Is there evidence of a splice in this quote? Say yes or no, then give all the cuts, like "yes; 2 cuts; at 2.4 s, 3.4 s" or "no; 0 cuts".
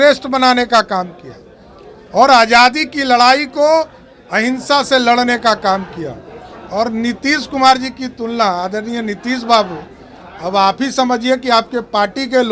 no; 0 cuts